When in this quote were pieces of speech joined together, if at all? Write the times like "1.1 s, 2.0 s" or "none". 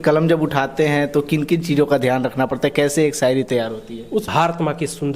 4.2 s

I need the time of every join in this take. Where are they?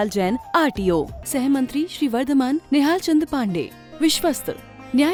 none

